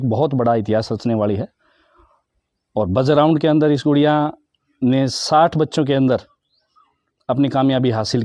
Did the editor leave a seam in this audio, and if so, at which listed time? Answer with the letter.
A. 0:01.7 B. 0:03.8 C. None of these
C